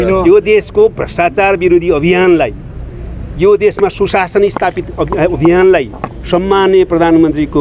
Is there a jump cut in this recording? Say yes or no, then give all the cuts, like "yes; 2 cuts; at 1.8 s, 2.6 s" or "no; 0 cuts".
no; 0 cuts